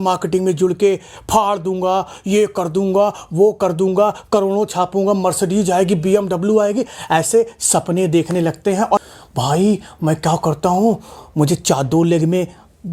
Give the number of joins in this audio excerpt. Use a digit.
1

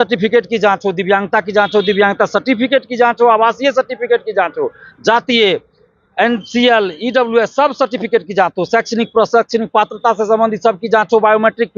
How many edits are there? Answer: 0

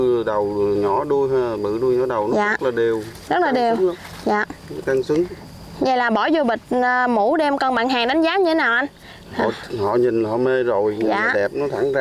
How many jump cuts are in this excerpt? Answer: 0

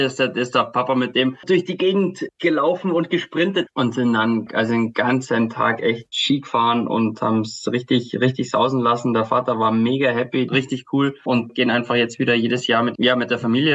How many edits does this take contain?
4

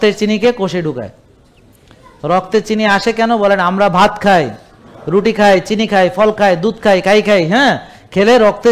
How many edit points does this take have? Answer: 0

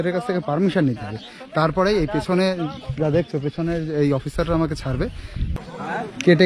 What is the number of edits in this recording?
1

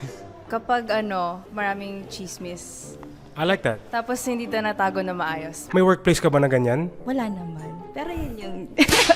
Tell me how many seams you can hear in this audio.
2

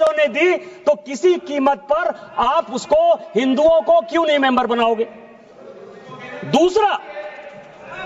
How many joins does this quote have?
0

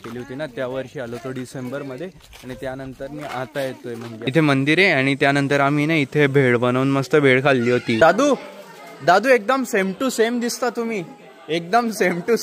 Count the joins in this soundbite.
2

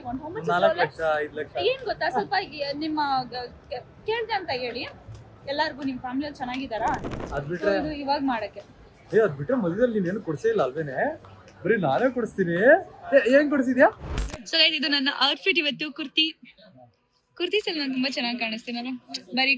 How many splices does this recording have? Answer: 3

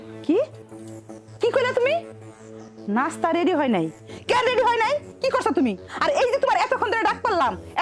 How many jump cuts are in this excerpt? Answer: 0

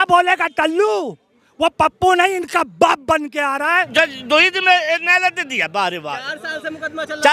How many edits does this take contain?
1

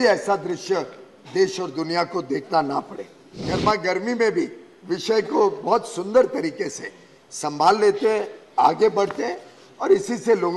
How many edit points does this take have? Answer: 1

